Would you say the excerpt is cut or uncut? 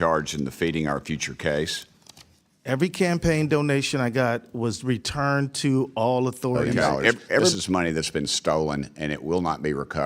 cut